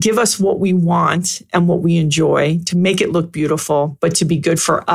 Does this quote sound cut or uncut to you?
uncut